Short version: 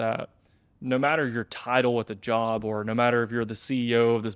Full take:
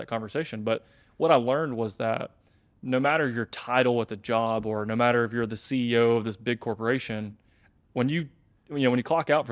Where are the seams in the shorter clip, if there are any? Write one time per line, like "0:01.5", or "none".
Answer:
none